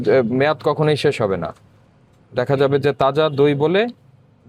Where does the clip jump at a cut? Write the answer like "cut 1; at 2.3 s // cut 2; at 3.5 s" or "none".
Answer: none